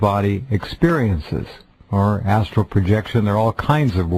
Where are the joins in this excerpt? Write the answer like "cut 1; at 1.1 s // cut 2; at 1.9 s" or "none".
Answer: cut 1; at 1.7 s